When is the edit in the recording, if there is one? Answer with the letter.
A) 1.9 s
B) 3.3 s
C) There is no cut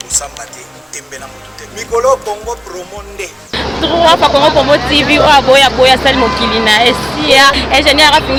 C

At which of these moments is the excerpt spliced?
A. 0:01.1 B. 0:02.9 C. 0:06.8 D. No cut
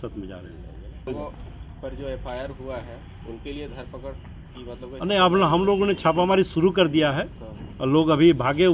A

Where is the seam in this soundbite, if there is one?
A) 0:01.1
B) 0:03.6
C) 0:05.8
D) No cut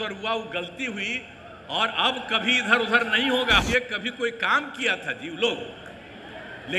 B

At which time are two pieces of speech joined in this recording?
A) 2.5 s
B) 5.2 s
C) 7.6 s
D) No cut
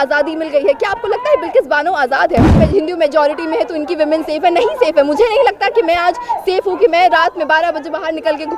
A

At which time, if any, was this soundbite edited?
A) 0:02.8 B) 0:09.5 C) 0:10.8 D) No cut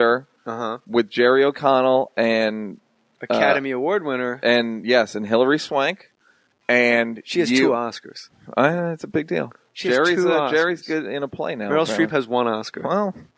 B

